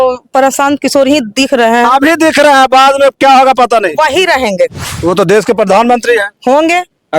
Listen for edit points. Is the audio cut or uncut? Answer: cut